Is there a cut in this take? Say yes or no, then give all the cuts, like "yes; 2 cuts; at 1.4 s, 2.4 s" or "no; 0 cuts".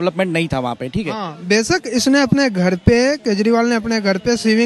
yes; 1 cut; at 1.3 s